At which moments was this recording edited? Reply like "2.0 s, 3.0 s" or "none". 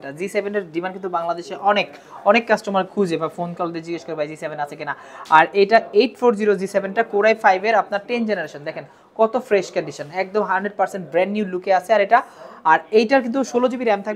none